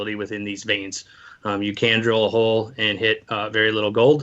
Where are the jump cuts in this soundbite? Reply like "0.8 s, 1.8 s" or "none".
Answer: 3.3 s